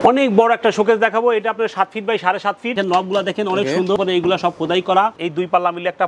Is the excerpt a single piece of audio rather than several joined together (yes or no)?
no